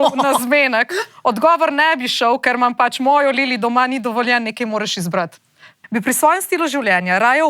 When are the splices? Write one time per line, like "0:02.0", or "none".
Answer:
0:05.7